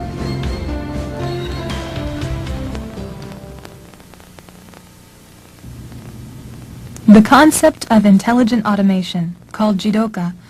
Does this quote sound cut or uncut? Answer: cut